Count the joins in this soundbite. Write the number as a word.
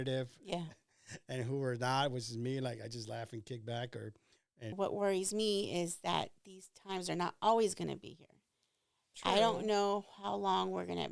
one